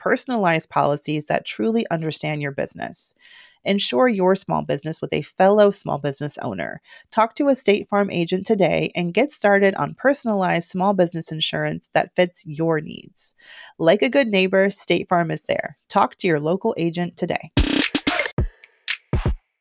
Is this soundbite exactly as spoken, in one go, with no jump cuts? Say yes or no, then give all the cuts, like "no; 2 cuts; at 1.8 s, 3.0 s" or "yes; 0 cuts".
no; 1 cut; at 18.4 s